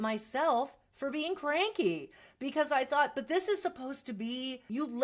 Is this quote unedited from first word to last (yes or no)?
yes